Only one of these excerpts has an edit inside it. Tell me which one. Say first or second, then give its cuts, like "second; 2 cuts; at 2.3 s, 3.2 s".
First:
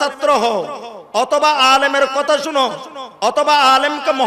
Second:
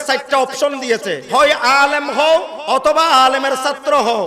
second; 2 cuts; at 1.2 s, 2.5 s